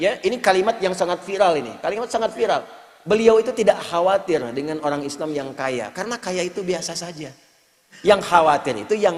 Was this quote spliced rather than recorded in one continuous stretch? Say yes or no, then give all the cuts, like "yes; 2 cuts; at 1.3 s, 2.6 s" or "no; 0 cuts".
no; 0 cuts